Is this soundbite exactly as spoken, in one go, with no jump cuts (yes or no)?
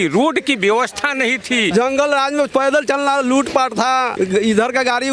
no